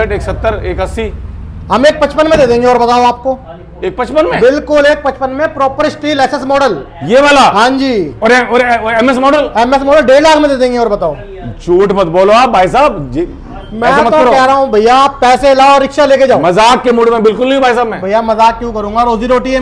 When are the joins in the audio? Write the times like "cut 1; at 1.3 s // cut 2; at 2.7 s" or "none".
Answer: none